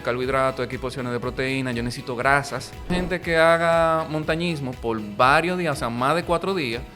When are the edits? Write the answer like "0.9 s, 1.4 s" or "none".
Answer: 2.9 s